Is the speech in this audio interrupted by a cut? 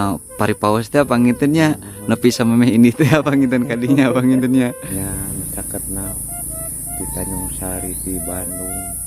yes; 1 cut; at 4.8 s

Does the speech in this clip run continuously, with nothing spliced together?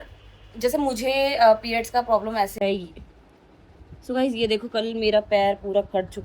no; 1 cut; at 2.5 s

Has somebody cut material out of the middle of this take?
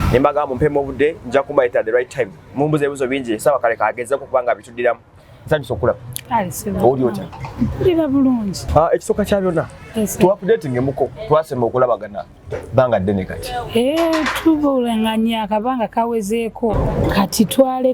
yes; 2 cuts; at 8.6 s, 16.7 s

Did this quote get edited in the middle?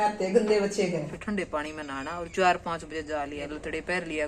yes; 2 cuts; at 1.2 s, 3.5 s

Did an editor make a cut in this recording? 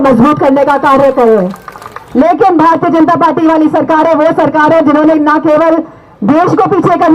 yes; 1 cut; at 1.9 s

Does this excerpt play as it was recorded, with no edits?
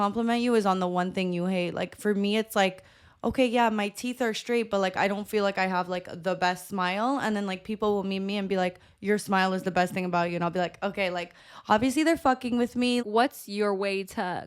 no; 1 cut; at 13.0 s

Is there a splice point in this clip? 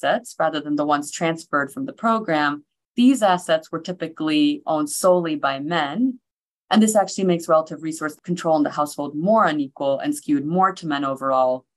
yes; 2 cuts; at 6.3 s, 8.2 s

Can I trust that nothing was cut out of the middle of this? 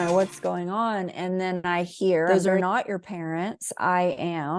no; 1 cut; at 2.3 s

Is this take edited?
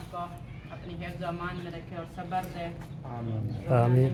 no; 0 cuts

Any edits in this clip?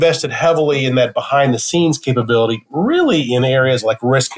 no; 0 cuts

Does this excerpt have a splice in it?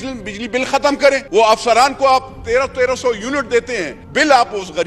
yes; 2 cuts; at 1.2 s, 4.0 s

